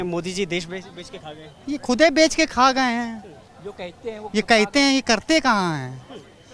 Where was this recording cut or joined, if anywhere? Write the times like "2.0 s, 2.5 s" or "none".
none